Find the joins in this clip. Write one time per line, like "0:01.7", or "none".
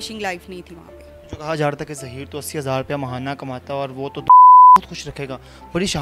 none